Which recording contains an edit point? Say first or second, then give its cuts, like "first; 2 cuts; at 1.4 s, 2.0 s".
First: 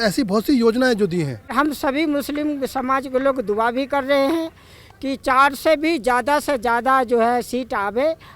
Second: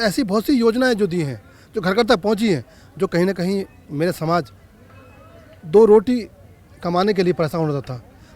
first; 1 cut; at 1.5 s